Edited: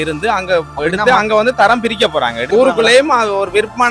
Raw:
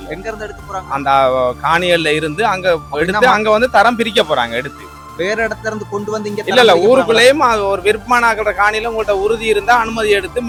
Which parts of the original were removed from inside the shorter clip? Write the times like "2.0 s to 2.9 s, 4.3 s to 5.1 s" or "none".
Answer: 4.6 s to 6.8 s